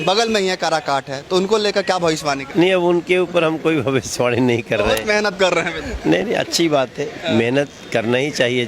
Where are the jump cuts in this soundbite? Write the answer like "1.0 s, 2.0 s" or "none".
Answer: 2.4 s, 5.8 s

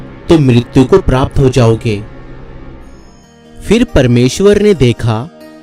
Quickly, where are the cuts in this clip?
none

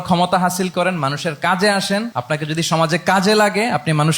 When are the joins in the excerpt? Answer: 2.1 s

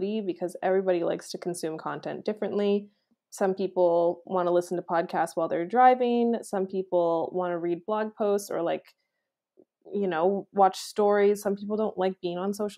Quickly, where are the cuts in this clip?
none

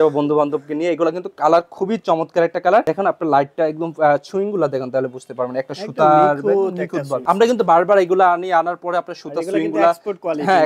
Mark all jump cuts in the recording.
none

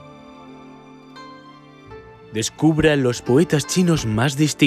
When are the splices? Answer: 2.3 s

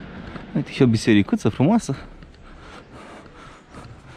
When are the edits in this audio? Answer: none

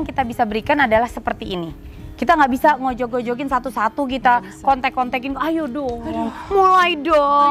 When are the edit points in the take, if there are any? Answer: none

